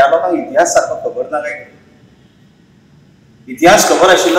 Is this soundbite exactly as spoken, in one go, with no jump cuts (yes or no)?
yes